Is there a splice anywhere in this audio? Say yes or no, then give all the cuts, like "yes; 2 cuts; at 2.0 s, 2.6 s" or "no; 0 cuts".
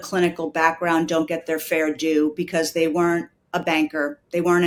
no; 0 cuts